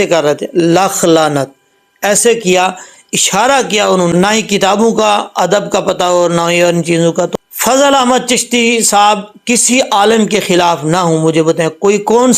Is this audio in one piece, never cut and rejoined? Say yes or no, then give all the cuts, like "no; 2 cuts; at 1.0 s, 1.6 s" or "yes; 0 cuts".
no; 2 cuts; at 4.1 s, 7.3 s